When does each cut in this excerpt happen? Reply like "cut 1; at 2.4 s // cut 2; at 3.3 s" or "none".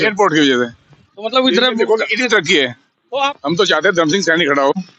cut 1; at 3.3 s